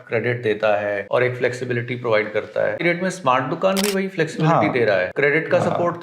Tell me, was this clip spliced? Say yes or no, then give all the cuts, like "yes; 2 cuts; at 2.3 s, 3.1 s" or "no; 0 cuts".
yes; 3 cuts; at 1.0 s, 2.8 s, 5.1 s